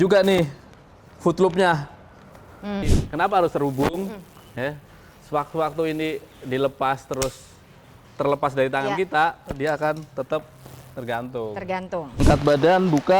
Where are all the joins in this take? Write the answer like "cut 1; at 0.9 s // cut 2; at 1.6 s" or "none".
cut 1; at 2.8 s // cut 2; at 12.1 s